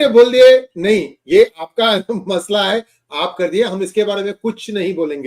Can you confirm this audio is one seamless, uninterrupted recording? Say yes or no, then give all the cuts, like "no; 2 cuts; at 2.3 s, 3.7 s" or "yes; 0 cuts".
yes; 0 cuts